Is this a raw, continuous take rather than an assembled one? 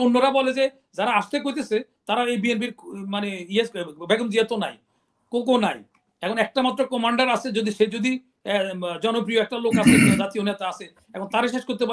yes; 0 cuts

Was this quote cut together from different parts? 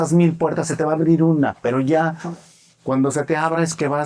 no; 0 cuts

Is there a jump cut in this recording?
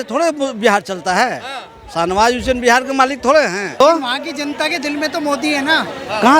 yes; 1 cut; at 3.8 s

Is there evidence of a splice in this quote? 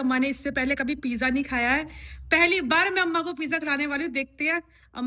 no; 0 cuts

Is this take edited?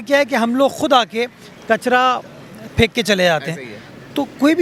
no; 0 cuts

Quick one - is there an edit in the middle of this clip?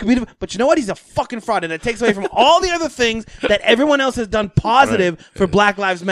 no; 0 cuts

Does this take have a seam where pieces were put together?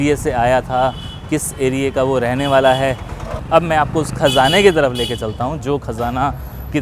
yes; 1 cut; at 3.3 s

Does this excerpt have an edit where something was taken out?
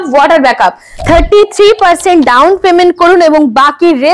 yes; 1 cut; at 1.0 s

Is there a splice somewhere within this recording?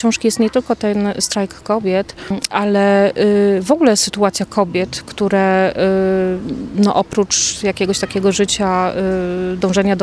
no; 0 cuts

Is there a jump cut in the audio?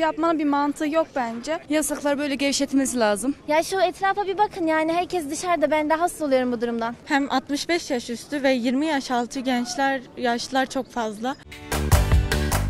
yes; 4 cuts; at 1.6 s, 3.4 s, 7.0 s, 11.5 s

